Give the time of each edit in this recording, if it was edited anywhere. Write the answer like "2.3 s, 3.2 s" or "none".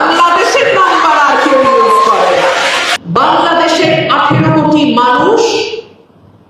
2.9 s